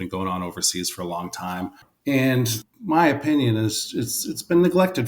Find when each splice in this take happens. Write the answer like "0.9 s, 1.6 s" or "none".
1.9 s, 2.7 s